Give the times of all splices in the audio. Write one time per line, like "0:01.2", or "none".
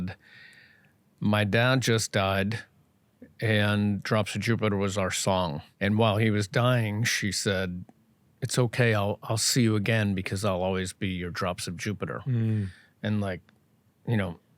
0:05.7